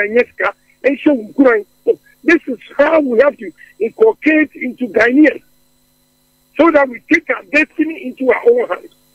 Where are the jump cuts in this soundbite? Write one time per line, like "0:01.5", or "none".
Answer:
none